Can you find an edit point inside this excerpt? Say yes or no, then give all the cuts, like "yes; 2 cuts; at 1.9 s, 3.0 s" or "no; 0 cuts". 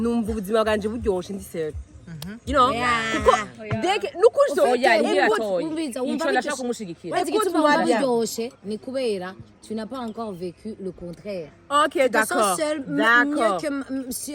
no; 0 cuts